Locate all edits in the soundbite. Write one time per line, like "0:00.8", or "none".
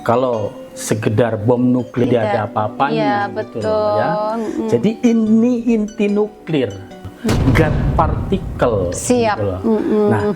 0:02.0